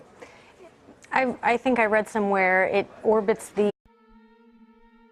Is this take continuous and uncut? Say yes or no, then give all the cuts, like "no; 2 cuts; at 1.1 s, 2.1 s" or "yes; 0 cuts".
yes; 0 cuts